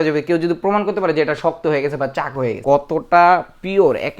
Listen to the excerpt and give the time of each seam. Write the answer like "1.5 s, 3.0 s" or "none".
2.6 s